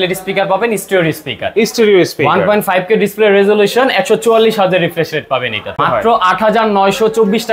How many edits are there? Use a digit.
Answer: 1